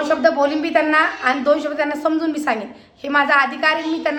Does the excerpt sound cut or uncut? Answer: uncut